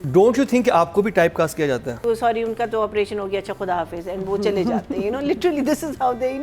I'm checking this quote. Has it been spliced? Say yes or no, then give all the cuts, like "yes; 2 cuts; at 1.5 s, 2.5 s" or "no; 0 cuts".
yes; 1 cut; at 2.0 s